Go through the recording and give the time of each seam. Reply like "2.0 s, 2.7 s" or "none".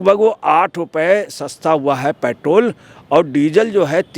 none